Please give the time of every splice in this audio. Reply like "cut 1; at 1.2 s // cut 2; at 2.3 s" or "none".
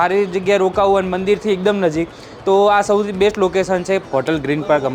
cut 1; at 4.0 s